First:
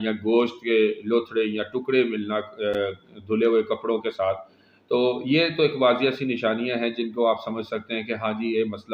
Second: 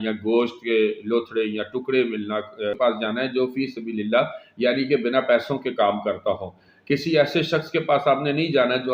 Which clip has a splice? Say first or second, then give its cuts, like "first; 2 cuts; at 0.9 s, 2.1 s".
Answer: second; 1 cut; at 2.8 s